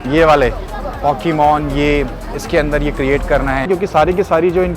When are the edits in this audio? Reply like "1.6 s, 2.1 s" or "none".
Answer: 3.7 s